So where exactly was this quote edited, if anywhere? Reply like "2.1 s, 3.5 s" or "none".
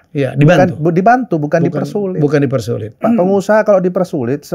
3.0 s